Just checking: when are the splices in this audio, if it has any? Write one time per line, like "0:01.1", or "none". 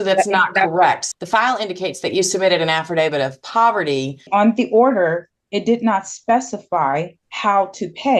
0:01.0
0:04.3
0:07.2